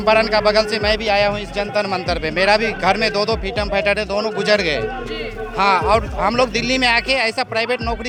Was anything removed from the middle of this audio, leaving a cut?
no; 0 cuts

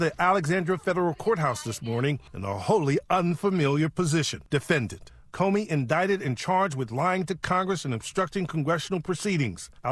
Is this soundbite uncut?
no; 2 cuts; at 2.3 s, 4.4 s

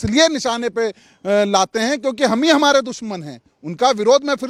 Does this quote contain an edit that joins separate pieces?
no; 0 cuts

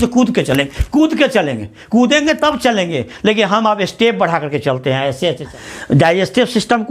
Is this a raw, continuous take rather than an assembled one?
no; 1 cut; at 5.5 s

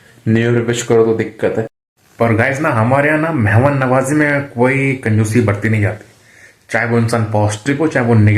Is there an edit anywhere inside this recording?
yes; 1 cut; at 1.8 s

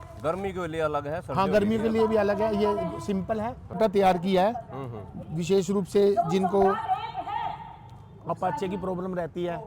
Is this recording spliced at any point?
yes; 1 cut; at 3.8 s

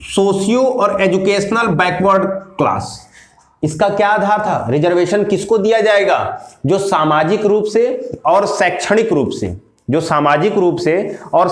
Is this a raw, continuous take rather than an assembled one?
yes; 0 cuts

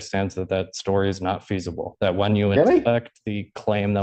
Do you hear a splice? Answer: no; 0 cuts

